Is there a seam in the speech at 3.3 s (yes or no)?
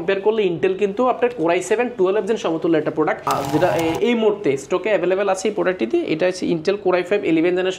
yes